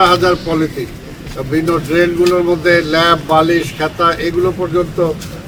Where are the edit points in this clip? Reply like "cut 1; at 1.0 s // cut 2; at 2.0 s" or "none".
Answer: none